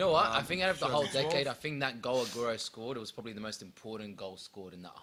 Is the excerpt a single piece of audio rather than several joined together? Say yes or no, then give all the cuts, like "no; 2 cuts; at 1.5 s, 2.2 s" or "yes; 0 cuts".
yes; 0 cuts